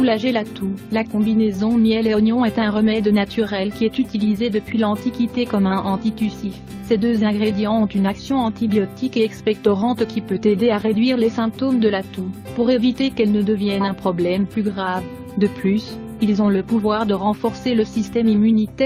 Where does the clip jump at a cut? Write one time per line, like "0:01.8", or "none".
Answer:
none

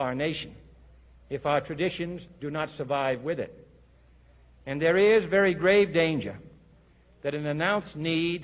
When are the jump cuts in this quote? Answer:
0:03.0

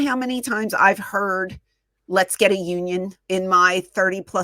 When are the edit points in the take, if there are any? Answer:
0:03.2

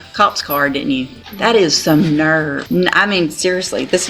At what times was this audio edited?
0:01.2
0:02.6

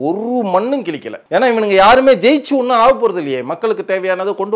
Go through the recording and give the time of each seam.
0:01.1

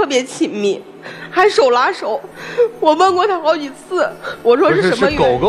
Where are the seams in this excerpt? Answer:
none

